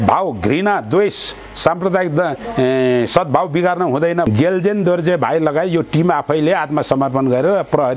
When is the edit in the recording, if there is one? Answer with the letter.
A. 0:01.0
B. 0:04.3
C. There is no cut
B